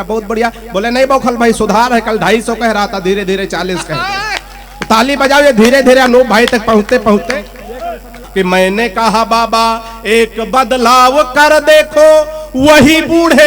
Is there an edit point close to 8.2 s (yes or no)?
yes